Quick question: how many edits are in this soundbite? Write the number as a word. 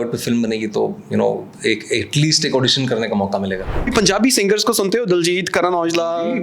one